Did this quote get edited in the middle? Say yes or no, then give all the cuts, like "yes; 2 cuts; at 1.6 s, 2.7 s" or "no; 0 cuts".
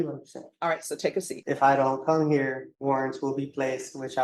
yes; 2 cuts; at 1.3 s, 2.7 s